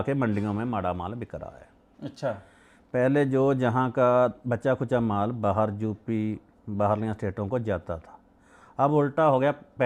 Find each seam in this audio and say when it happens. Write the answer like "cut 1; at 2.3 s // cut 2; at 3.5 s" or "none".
none